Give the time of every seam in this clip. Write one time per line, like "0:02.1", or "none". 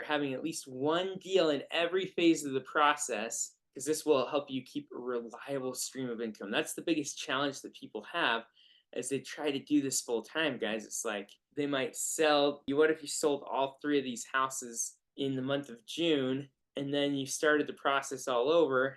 0:11.4
0:12.6

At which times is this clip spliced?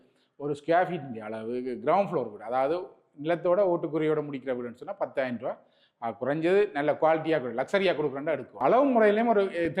0:08.6

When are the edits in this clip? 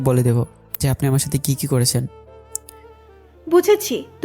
none

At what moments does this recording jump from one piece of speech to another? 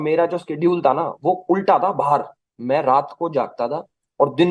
none

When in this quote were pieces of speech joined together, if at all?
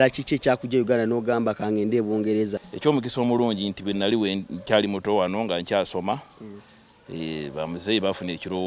0:02.7

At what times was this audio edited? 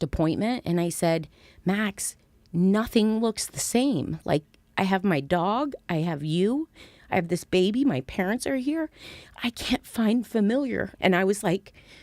0:10.9

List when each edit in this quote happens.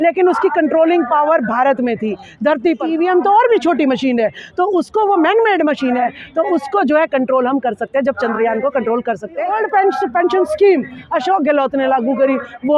0:02.9
0:09.5

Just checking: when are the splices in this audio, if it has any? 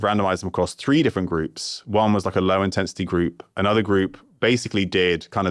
none

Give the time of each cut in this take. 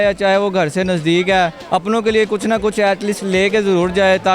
0:01.6

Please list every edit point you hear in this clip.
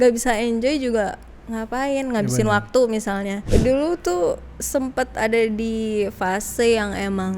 0:03.4

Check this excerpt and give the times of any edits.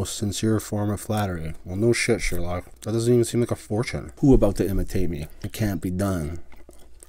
0:02.7
0:04.0
0:05.4

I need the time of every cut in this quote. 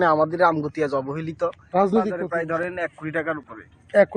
0:02.2

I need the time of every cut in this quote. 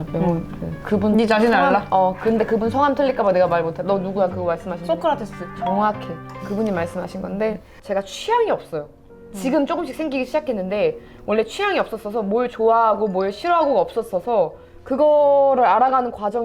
none

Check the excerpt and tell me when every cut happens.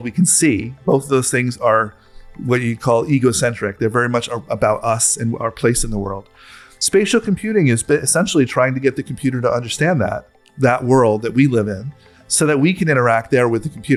none

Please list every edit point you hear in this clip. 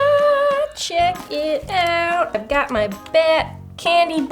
0:02.3

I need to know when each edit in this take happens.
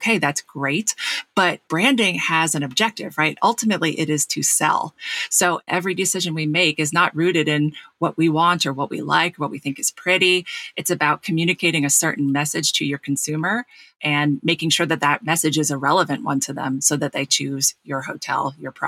0:05.7

